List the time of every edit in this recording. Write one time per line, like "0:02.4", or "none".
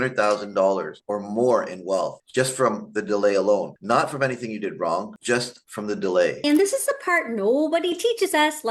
0:06.4